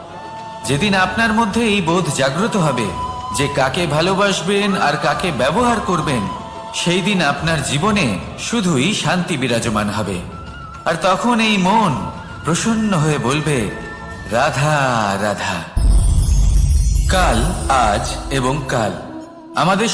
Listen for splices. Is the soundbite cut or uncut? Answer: uncut